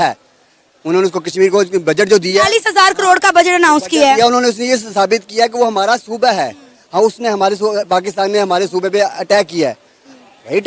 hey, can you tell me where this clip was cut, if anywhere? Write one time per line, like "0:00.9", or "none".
none